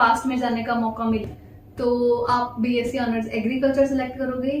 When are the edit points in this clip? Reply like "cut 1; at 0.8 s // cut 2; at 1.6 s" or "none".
cut 1; at 1.3 s

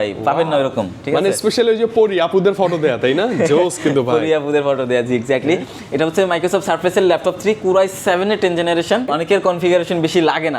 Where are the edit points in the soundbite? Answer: cut 1; at 9.1 s

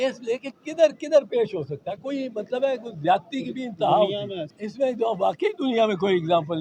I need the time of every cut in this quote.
none

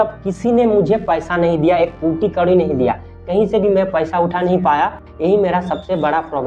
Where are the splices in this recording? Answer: cut 1; at 5.0 s

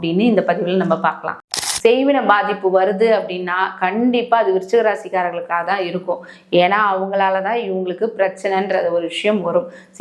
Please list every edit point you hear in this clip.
cut 1; at 1.4 s

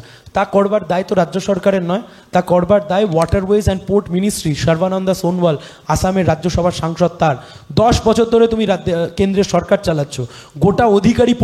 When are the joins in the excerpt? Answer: none

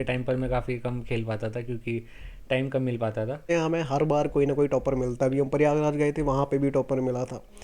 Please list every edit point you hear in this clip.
cut 1; at 3.4 s

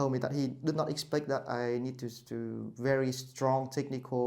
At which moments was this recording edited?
none

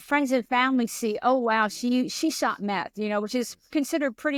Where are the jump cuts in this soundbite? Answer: none

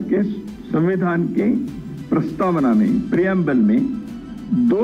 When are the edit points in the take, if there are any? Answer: none

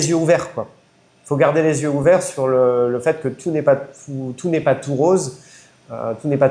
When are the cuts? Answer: none

